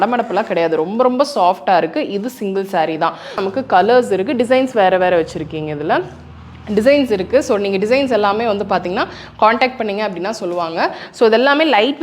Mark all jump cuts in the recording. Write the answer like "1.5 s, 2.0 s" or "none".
3.4 s